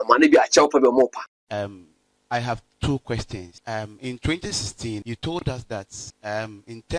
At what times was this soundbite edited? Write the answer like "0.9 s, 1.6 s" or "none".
1.4 s, 3.5 s, 5.0 s, 6.0 s